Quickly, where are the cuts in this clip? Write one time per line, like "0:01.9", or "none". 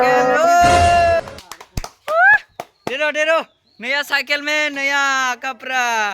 0:01.2